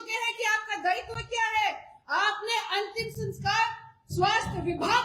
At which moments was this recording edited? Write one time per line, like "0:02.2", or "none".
none

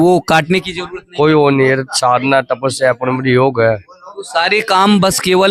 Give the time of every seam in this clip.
none

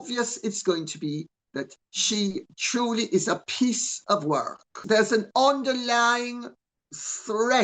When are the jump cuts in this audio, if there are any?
0:04.8

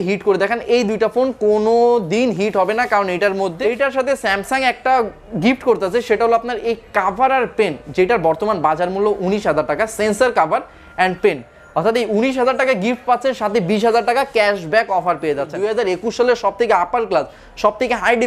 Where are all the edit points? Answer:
0:03.5
0:15.5

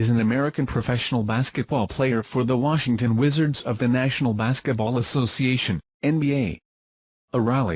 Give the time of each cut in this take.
none

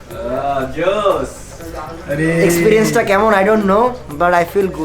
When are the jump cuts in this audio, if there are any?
none

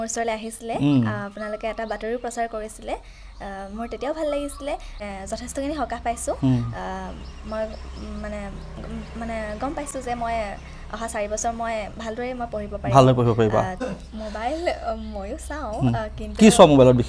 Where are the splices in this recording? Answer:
0:05.0
0:13.8

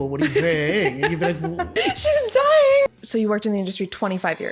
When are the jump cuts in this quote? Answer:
0:01.8
0:02.9

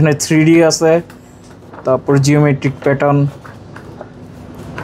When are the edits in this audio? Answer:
none

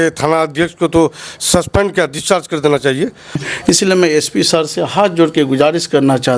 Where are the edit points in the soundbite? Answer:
0:03.5

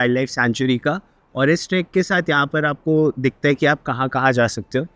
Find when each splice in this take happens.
none

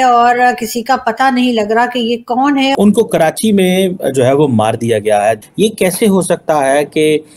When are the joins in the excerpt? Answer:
0:02.8

